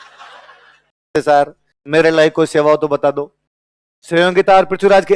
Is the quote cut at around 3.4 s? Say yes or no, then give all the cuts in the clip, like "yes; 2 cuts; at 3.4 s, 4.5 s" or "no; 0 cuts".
no; 1 cut; at 1.1 s